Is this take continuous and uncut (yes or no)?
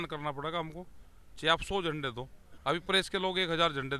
yes